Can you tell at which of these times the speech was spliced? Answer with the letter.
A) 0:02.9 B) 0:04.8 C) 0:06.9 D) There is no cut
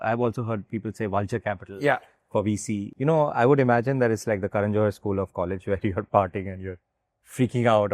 A